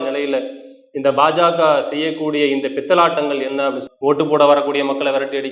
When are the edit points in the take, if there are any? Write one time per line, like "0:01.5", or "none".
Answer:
0:03.8